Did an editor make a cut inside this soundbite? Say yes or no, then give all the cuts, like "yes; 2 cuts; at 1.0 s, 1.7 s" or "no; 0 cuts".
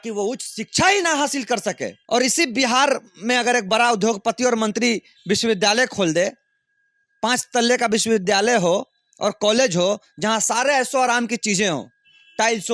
yes; 1 cut; at 1.9 s